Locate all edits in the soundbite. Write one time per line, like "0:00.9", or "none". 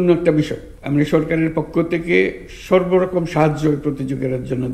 none